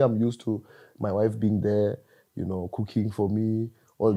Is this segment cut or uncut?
uncut